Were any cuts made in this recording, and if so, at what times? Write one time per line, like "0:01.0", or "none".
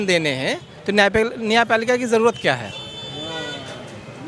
none